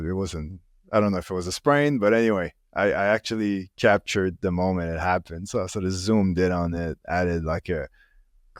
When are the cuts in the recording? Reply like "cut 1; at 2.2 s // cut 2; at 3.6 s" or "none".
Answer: none